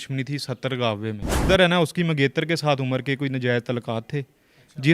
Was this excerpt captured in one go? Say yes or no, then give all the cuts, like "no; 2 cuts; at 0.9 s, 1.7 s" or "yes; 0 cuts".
no; 1 cut; at 1.4 s